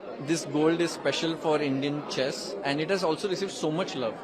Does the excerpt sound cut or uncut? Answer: uncut